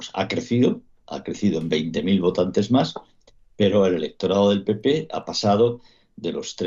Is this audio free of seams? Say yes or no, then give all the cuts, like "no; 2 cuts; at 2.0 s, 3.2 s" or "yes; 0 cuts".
yes; 0 cuts